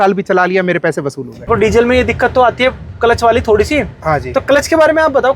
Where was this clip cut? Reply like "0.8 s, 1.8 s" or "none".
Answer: 1.5 s